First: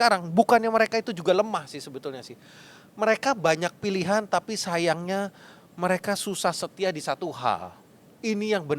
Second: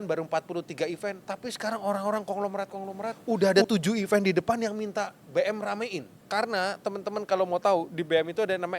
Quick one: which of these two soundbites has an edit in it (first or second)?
second